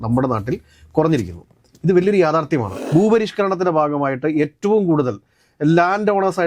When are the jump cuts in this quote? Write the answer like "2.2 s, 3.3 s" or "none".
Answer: 2.8 s